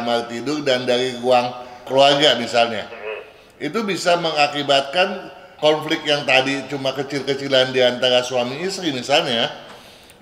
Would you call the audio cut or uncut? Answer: uncut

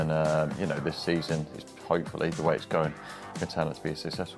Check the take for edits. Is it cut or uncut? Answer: uncut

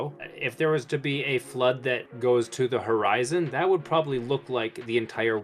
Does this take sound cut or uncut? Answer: cut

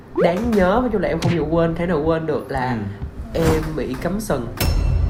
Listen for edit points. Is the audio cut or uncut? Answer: uncut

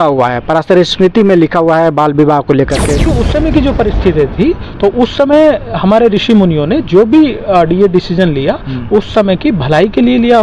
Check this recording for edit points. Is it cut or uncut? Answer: cut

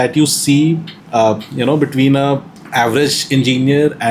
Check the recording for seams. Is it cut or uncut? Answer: cut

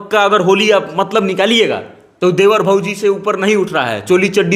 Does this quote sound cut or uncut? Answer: uncut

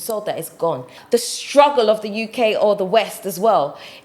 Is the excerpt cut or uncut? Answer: cut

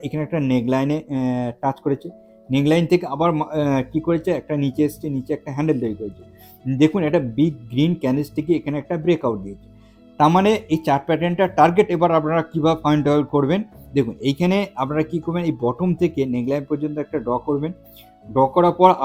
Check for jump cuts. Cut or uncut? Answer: uncut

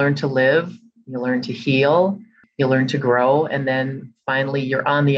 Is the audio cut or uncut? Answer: cut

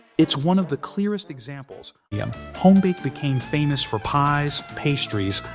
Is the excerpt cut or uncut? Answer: cut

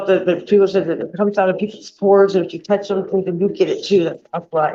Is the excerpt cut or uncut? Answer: uncut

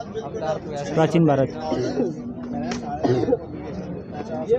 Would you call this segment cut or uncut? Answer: uncut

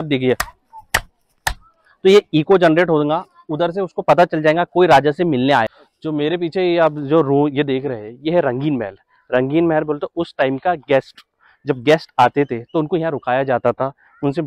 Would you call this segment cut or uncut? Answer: cut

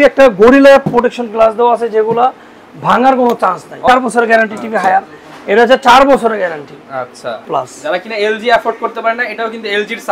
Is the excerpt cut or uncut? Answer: cut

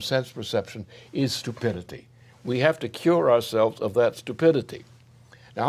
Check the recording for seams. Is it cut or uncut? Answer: uncut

